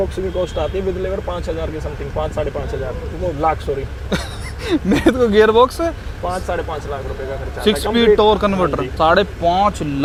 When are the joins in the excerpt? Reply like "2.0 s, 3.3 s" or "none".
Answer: none